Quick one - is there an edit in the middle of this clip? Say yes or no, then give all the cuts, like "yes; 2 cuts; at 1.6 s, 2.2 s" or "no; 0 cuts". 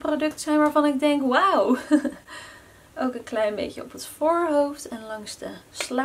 no; 0 cuts